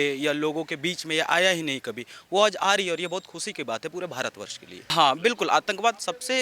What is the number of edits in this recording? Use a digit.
1